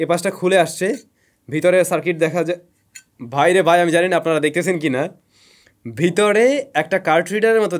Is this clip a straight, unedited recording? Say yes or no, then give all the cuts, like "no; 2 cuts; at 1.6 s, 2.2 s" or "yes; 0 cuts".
yes; 0 cuts